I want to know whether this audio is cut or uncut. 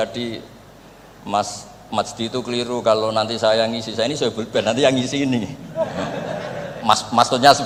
uncut